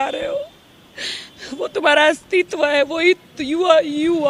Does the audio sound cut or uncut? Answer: uncut